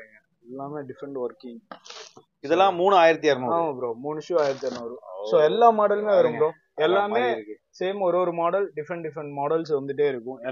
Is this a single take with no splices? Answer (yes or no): yes